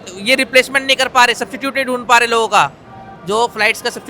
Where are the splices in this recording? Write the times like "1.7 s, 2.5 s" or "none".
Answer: none